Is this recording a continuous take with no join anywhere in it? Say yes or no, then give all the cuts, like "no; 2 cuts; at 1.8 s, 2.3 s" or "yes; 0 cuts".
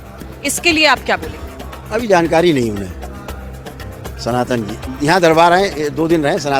yes; 0 cuts